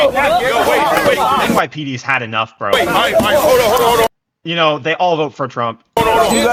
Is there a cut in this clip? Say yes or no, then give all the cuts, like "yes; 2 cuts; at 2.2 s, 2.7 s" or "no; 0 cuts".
no; 0 cuts